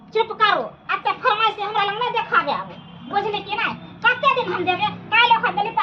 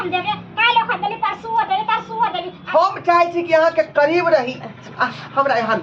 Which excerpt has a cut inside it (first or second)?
second